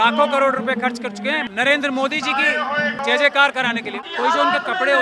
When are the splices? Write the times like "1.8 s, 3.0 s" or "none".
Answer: 1.5 s, 3.0 s, 3.9 s